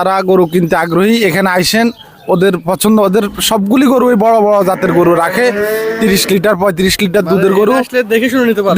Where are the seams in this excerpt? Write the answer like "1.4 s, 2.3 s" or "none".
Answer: none

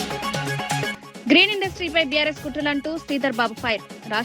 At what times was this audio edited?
1.0 s

